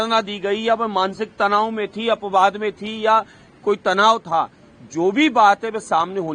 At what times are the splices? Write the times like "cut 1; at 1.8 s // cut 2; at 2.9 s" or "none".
none